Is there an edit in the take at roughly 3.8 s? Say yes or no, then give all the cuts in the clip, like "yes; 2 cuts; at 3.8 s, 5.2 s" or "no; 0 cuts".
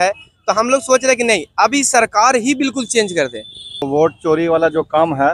yes; 1 cut; at 3.8 s